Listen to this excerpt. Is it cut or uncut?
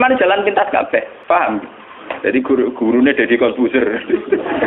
cut